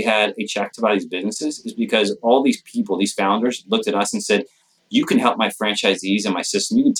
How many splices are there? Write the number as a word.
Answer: zero